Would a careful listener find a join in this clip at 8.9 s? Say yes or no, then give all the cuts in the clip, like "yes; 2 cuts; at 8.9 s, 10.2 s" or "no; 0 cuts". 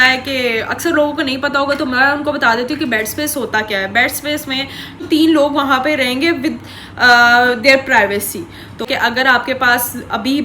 yes; 2 cuts; at 5.0 s, 8.9 s